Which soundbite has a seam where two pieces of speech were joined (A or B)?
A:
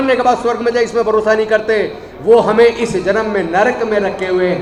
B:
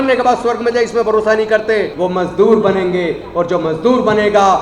B